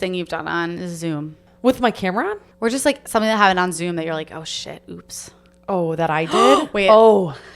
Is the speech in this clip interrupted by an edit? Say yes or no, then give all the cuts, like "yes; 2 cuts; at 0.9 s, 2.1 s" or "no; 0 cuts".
yes; 2 cuts; at 1.4 s, 2.4 s